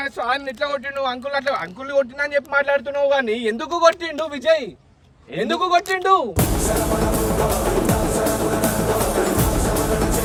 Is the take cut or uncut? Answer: uncut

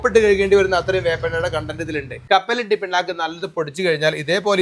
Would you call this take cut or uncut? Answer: cut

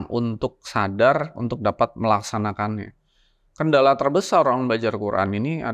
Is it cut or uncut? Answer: uncut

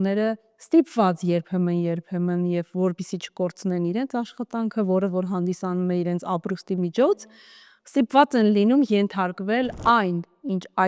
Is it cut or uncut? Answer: cut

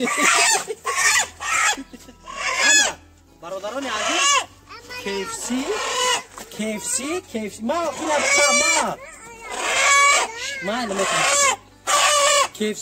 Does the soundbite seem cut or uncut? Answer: uncut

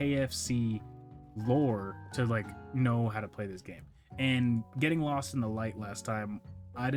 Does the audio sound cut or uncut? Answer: uncut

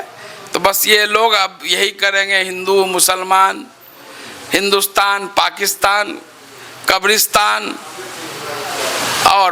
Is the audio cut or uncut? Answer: uncut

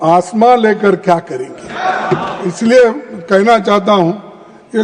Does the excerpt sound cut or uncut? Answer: cut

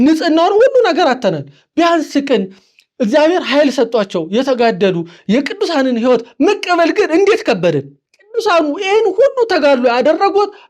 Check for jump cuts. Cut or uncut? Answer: cut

